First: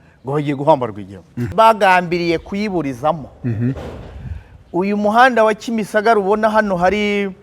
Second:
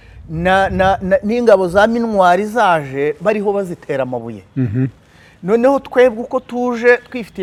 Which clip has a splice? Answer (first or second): first